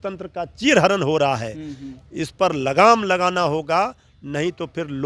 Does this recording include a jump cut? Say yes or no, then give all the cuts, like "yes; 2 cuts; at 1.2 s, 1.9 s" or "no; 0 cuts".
no; 0 cuts